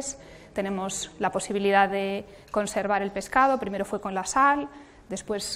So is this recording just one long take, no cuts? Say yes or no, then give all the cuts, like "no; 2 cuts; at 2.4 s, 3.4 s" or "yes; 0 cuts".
no; 1 cut; at 2.8 s